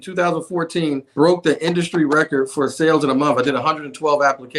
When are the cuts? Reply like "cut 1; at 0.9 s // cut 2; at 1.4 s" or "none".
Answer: cut 1; at 1.1 s